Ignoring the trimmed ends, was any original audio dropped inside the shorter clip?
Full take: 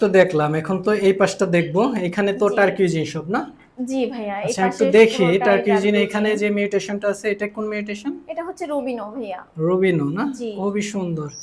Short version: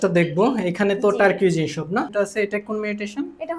yes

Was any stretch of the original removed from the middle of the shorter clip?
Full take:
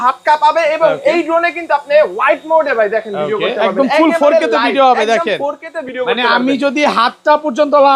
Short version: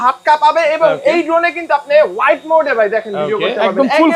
no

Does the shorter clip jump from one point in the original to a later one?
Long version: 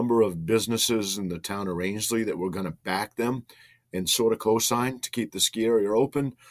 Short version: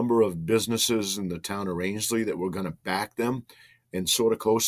no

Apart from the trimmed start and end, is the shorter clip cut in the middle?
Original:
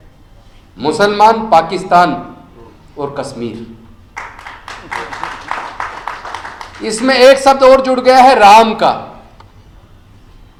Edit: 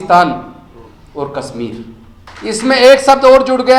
yes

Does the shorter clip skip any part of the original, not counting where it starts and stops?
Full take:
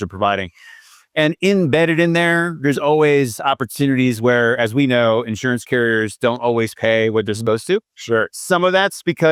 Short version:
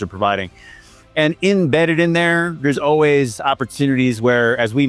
no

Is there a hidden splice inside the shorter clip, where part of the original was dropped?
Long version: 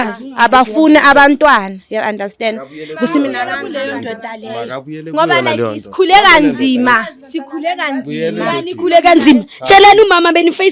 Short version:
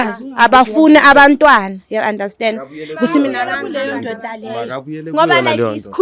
no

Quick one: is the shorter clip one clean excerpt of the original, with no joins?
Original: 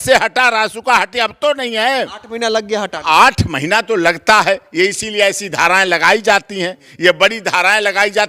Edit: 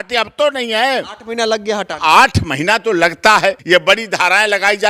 no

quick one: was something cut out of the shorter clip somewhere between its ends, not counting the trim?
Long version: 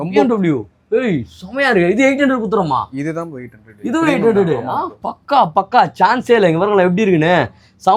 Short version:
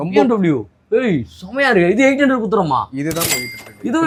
no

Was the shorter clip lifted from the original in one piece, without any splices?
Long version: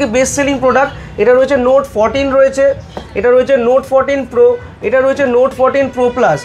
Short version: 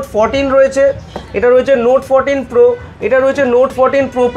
yes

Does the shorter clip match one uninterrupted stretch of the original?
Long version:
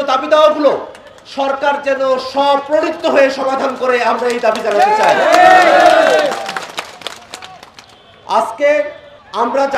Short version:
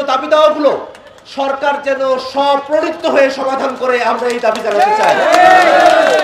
yes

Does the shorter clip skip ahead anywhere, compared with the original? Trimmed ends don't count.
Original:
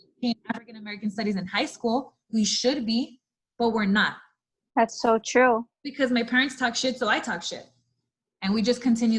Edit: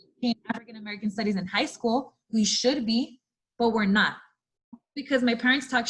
yes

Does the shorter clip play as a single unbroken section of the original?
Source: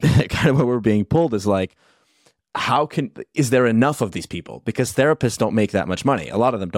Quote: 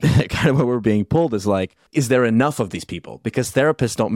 no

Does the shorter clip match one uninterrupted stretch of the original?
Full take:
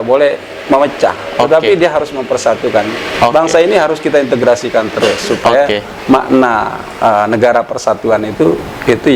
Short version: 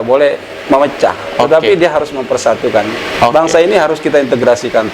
yes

